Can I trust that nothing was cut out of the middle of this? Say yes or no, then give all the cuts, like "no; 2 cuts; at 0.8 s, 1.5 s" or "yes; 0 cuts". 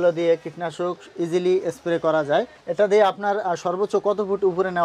no; 1 cut; at 2.6 s